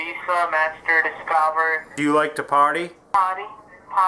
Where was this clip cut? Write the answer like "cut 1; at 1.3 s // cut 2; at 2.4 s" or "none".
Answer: cut 1; at 1.9 s // cut 2; at 3.1 s